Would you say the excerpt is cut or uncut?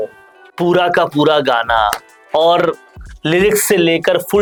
uncut